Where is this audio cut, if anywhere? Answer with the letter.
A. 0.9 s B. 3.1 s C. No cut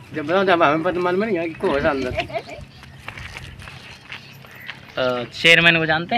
C